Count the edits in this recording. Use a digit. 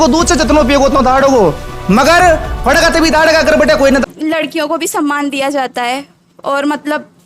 1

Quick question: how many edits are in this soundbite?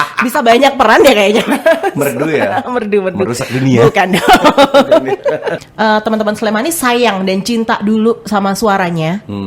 1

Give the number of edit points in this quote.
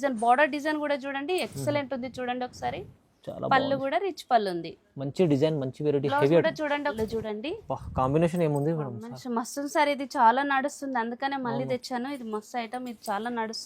1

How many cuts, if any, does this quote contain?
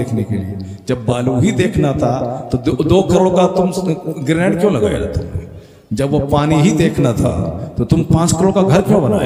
0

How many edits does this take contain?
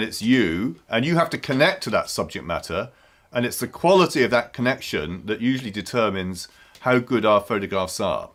0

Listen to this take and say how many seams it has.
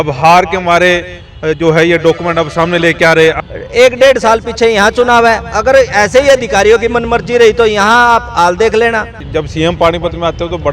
2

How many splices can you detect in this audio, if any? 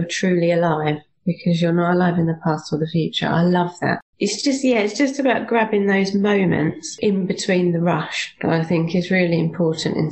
2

